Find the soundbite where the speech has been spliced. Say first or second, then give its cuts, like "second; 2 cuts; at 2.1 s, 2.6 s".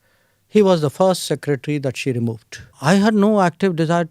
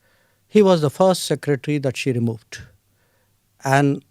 first; 1 cut; at 2.7 s